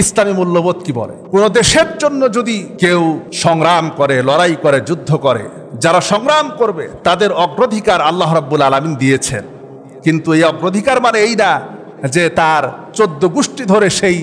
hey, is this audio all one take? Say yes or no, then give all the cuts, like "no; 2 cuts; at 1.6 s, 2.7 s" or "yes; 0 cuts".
no; 3 cuts; at 1.1 s, 2.7 s, 3.3 s